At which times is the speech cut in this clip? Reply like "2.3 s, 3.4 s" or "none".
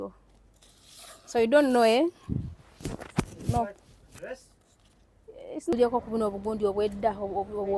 5.7 s